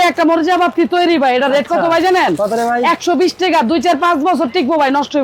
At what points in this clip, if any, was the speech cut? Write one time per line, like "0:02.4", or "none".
none